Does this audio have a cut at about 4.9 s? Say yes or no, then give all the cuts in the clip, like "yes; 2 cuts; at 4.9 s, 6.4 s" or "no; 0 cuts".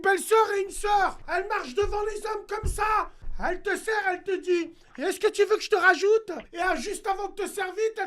no; 3 cuts; at 1.2 s, 3.2 s, 6.4 s